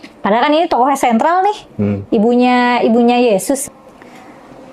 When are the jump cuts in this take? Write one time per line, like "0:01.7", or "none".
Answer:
0:03.6